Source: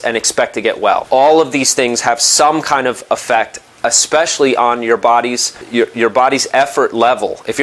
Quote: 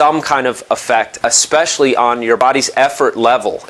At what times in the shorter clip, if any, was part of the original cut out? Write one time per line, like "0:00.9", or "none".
0:01.1
0:02.4